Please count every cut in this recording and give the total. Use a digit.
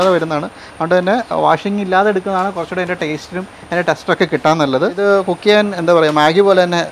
1